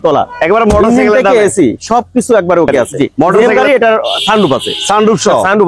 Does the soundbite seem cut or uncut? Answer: cut